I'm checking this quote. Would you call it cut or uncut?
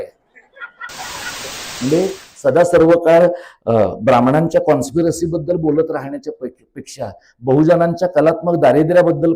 cut